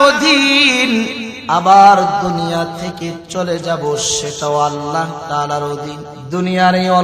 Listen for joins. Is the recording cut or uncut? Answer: cut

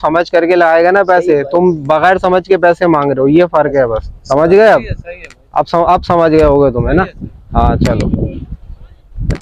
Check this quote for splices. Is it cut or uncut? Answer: uncut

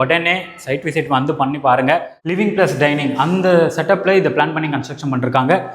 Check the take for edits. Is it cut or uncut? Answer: cut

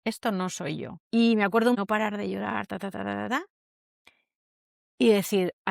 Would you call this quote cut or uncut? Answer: cut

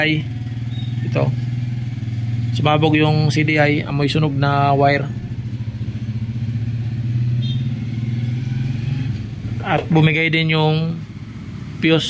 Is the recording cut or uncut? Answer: uncut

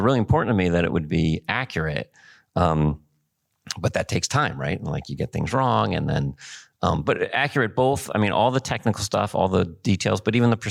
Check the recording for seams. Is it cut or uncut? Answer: uncut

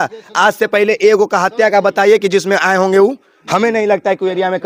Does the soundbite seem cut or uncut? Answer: uncut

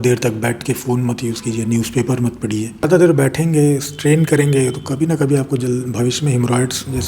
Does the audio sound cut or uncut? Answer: cut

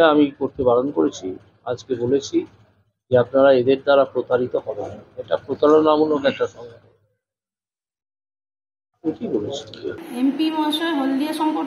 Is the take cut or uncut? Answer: cut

